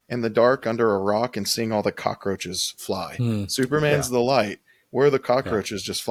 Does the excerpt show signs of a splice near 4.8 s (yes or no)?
no